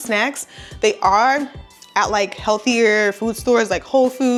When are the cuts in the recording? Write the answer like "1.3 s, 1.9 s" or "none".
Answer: none